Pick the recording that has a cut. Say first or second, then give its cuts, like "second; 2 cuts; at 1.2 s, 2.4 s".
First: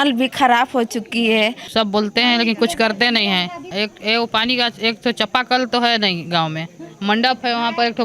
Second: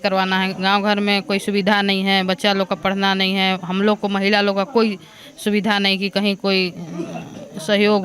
first; 2 cuts; at 1.6 s, 3.7 s